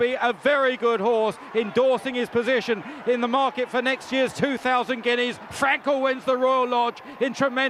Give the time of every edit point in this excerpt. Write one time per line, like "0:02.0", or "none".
none